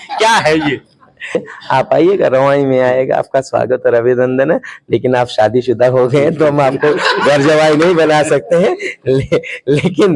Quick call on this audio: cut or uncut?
cut